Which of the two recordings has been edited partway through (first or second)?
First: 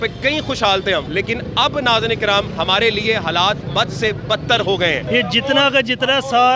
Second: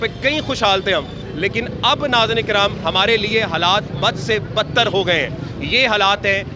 first